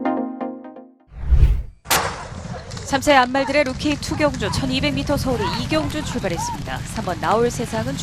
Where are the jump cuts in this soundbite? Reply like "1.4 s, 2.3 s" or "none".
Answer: 1.7 s